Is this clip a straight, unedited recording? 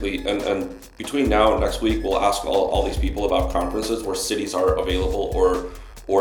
yes; 0 cuts

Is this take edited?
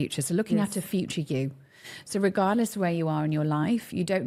no; 0 cuts

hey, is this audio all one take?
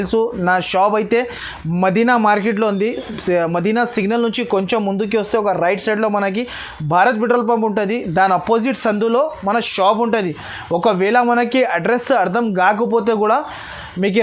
yes; 0 cuts

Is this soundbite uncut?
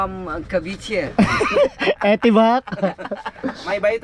yes; 0 cuts

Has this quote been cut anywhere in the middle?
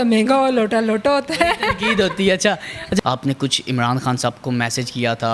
yes; 1 cut; at 3.0 s

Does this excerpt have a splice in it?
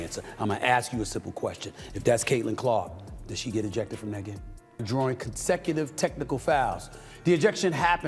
yes; 1 cut; at 4.7 s

